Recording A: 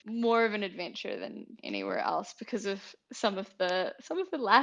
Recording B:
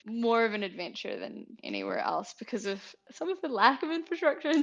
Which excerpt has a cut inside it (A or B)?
B